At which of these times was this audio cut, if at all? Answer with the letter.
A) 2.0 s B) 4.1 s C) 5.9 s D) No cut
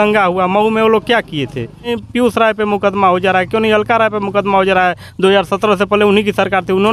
A